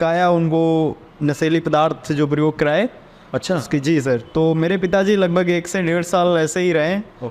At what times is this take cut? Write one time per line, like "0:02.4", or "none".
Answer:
none

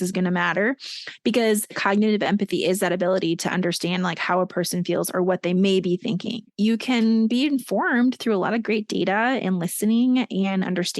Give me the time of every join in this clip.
0:01.8
0:06.4

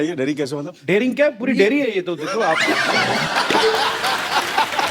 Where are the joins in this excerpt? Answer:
none

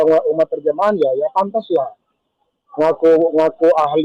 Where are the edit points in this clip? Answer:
none

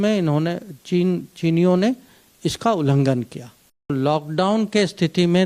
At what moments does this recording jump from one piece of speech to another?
0:03.9

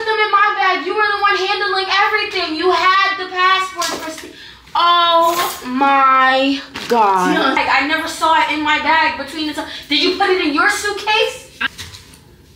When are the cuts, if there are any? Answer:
0:07.6
0:11.5

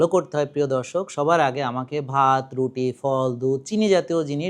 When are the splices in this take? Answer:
none

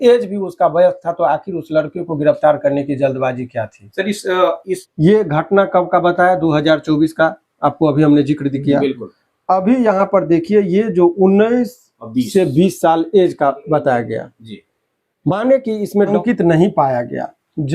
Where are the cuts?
0:04.8
0:16.1

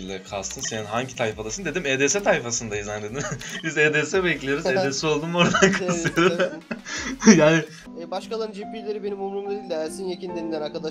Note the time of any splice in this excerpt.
0:07.8

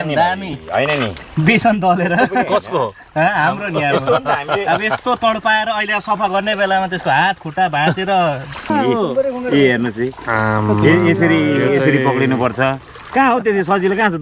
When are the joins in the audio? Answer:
0:08.7

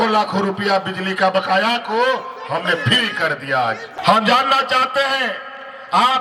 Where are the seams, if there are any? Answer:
0:04.0

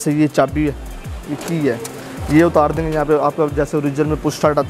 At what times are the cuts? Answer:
none

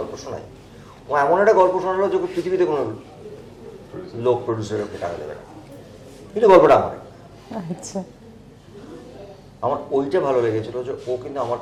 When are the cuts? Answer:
none

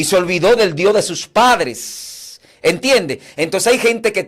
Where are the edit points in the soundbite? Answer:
none

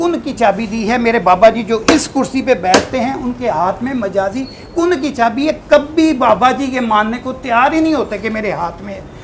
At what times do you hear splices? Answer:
none

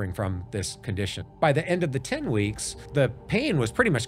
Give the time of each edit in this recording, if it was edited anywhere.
0:01.1
0:02.8

